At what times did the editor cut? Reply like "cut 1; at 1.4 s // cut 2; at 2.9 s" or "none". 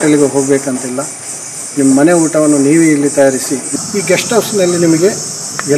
cut 1; at 3.7 s

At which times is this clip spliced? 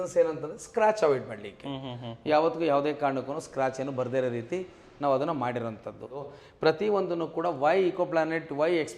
cut 1; at 6.2 s

